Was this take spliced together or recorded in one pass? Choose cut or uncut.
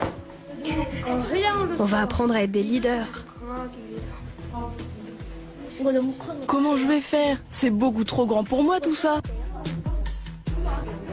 uncut